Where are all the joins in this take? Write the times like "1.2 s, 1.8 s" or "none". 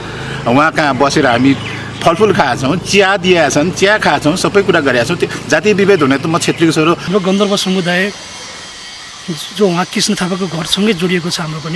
7.0 s